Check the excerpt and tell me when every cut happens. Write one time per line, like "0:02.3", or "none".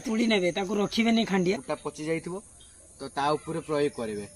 0:01.6